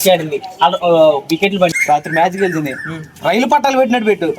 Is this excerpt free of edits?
no; 1 cut; at 1.8 s

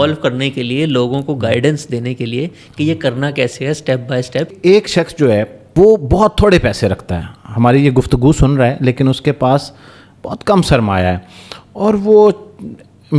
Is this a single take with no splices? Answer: no; 2 cuts; at 4.5 s, 5.6 s

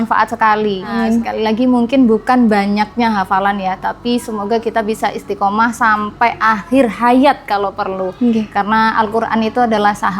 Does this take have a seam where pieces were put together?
yes; 1 cut; at 1.0 s

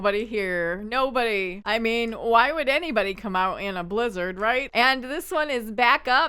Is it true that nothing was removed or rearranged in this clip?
no; 1 cut; at 4.7 s

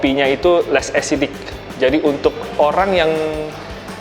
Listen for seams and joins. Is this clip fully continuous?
yes; 0 cuts

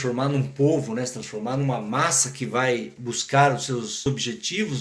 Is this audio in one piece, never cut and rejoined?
yes; 0 cuts

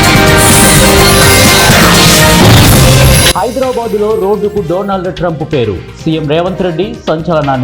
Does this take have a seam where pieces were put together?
yes; 2 cuts; at 2.0 s, 3.4 s

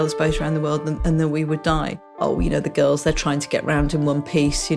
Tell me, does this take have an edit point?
yes; 1 cut; at 2.2 s

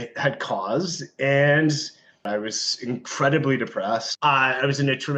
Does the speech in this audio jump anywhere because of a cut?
yes; 2 cuts; at 2.3 s, 4.1 s

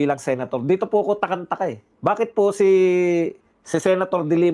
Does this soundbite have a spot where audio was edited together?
yes; 1 cut; at 1.9 s

